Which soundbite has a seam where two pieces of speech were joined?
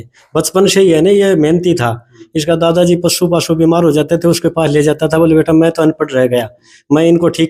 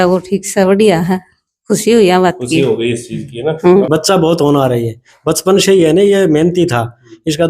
second; 1 cut; at 3.9 s

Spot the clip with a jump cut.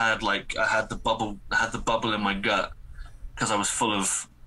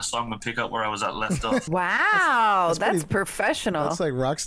second; 1 cut; at 1.7 s

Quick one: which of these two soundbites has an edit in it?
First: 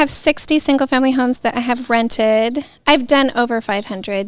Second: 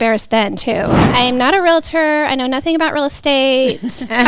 second; 1 cut; at 1.1 s

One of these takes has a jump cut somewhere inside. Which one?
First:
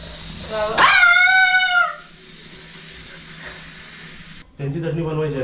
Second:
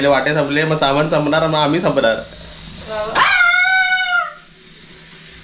first; 1 cut; at 4.5 s

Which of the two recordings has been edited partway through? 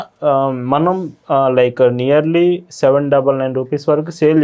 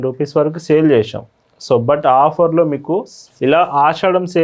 second; 1 cut; at 3.2 s

